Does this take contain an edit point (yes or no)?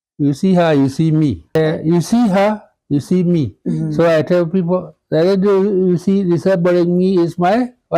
yes